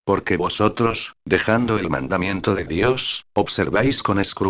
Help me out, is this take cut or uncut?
cut